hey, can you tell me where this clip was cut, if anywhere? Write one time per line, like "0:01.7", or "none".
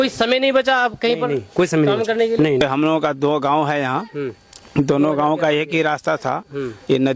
0:02.6